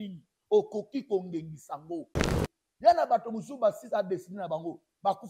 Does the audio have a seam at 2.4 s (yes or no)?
yes